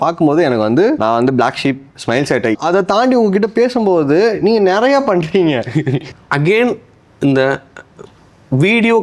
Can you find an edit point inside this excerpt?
yes; 3 cuts; at 1.0 s, 2.5 s, 6.1 s

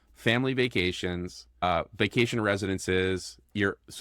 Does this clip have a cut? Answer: yes; 1 cut; at 1.6 s

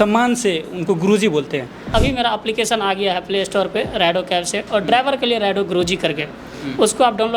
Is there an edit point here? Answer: yes; 1 cut; at 1.9 s

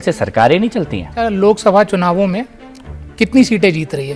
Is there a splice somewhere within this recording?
yes; 1 cut; at 1.3 s

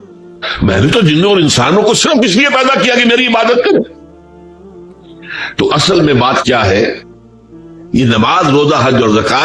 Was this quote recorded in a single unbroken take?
no; 2 cuts; at 3.9 s, 5.5 s

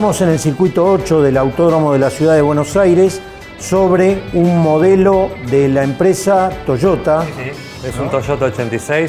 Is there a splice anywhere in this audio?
no; 0 cuts

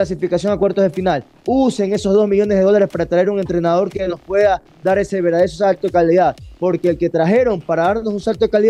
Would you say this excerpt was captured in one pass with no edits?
yes; 0 cuts

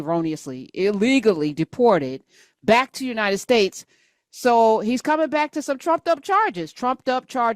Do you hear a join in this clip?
no; 0 cuts

